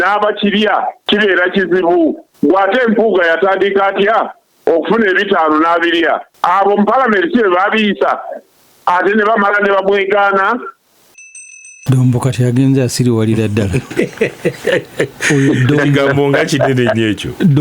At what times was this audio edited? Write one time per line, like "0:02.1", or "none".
0:01.0
0:02.3
0:06.3
0:11.4